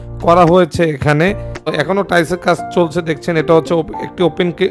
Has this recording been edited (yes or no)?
yes